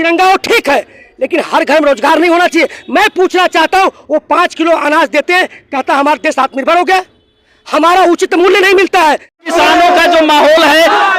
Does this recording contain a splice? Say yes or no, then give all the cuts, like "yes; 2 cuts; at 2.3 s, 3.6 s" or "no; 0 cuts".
yes; 1 cut; at 9.5 s